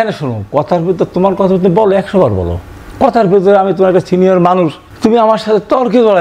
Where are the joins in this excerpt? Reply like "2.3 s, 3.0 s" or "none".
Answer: 4.8 s